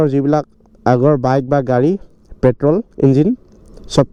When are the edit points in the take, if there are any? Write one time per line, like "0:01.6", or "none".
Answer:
none